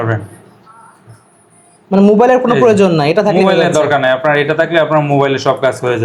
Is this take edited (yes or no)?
no